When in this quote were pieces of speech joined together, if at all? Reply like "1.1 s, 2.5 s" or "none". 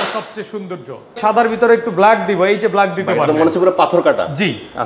1.2 s